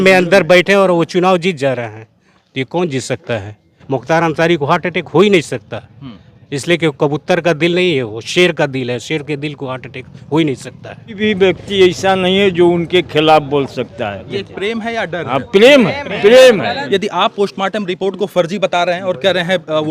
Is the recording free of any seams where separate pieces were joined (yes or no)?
no